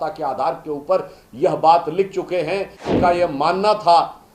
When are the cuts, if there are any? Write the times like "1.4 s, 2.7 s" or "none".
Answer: 2.8 s